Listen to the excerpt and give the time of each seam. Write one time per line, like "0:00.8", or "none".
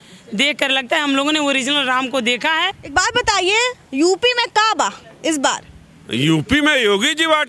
0:02.8